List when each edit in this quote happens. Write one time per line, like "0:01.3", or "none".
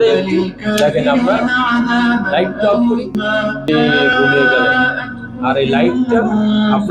none